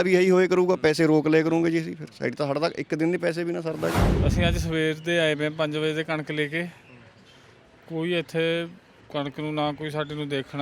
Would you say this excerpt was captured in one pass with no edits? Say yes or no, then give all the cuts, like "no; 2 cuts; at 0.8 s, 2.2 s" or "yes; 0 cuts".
no; 1 cut; at 4.1 s